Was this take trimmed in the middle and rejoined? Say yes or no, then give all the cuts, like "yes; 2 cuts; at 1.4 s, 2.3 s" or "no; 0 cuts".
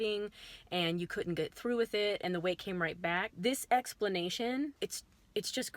yes; 2 cuts; at 3.3 s, 4.7 s